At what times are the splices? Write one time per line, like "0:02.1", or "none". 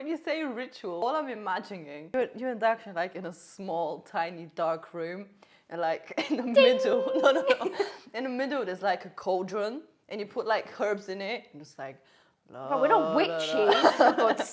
0:01.0
0:02.1